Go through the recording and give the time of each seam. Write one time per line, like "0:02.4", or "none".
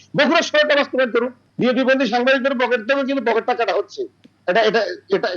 0:01.4